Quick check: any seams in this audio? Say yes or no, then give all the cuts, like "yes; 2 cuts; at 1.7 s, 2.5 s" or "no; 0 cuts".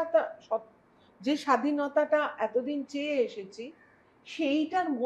no; 0 cuts